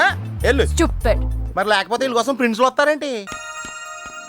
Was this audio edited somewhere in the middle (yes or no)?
no